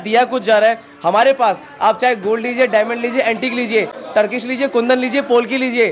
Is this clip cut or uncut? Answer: uncut